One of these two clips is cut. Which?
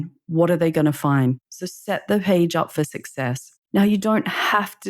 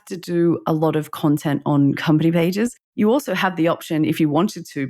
first; 1 cut; at 3.5 s

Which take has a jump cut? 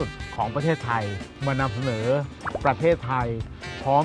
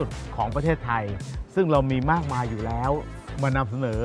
first; 2 cuts; at 1.2 s, 2.4 s

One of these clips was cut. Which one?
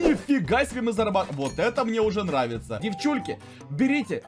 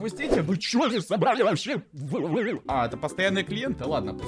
first; 1 cut; at 2.8 s

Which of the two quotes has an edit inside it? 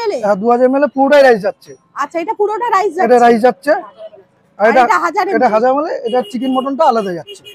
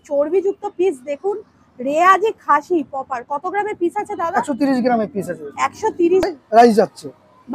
second; 1 cut; at 6.3 s

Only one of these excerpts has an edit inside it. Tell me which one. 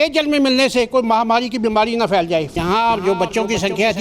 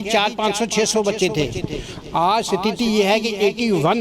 first; 1 cut; at 2.5 s

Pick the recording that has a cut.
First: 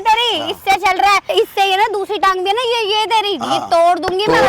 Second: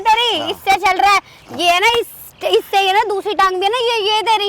first; 1 cut; at 1.2 s

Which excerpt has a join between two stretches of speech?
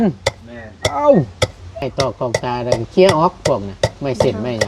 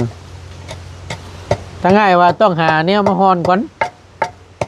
first; 1 cut; at 1.8 s

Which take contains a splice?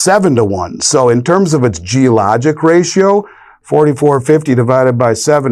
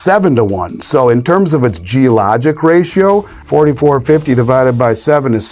second; 1 cut; at 3.4 s

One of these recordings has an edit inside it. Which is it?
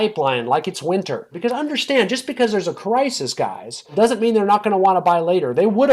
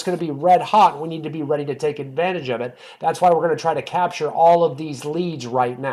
first; 2 cuts; at 1.3 s, 3.9 s

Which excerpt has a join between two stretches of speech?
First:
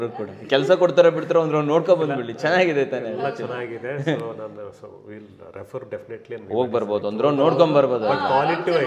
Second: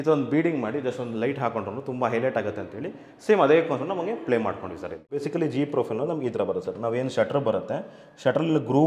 second; 1 cut; at 5.2 s

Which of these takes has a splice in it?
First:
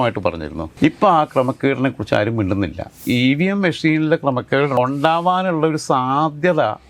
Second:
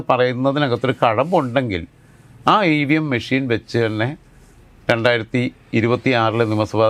first; 1 cut; at 3.0 s

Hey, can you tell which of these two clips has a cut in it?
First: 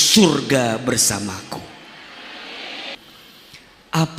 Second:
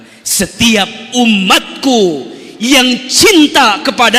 first; 1 cut; at 3.0 s

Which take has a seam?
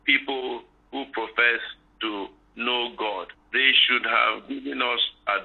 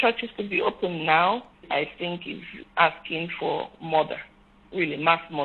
second; 2 cuts; at 1.6 s, 2.5 s

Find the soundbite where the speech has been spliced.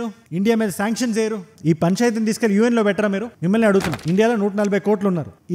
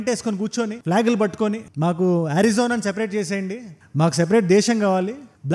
first; 1 cut; at 4.0 s

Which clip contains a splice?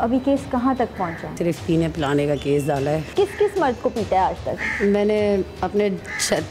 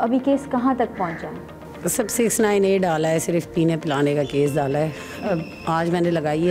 first; 2 cuts; at 1.4 s, 3.1 s

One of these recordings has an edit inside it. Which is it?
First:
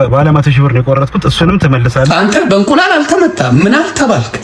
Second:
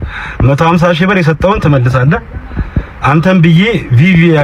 first; 1 cut; at 2.1 s

